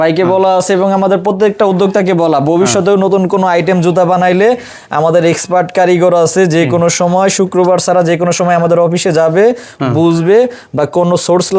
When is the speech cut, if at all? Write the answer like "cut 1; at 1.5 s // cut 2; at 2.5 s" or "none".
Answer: none